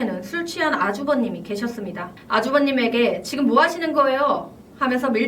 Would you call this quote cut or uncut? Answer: cut